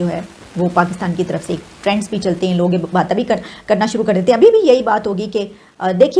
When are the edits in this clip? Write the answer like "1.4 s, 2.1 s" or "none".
none